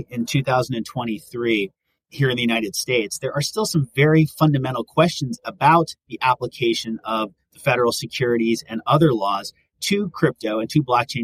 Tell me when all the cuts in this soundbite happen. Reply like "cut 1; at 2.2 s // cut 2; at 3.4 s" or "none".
none